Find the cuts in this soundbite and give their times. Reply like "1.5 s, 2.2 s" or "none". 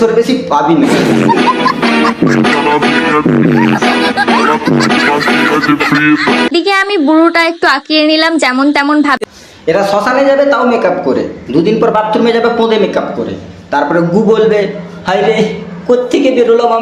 6.5 s